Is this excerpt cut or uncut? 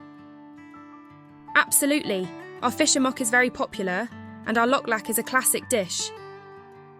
cut